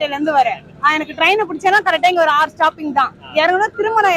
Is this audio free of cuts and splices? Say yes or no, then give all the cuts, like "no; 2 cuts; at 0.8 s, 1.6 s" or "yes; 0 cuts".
yes; 0 cuts